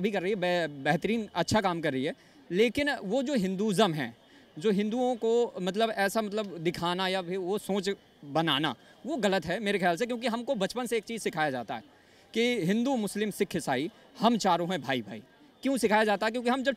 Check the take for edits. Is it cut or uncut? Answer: uncut